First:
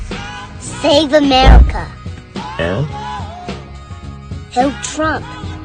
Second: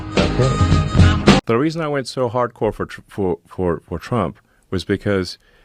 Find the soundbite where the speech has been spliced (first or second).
second